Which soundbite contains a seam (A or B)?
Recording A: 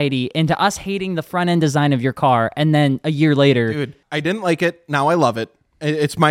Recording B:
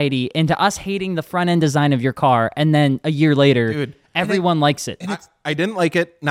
A